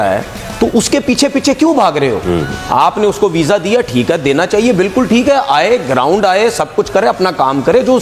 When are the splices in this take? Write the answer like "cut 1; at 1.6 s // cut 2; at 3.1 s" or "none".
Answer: none